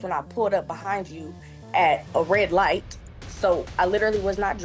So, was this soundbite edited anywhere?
no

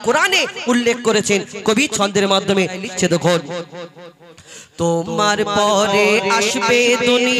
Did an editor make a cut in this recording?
yes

